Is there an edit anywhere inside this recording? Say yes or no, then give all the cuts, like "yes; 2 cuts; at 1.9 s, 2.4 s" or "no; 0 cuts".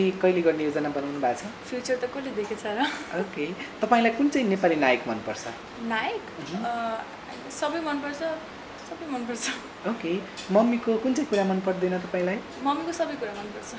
no; 0 cuts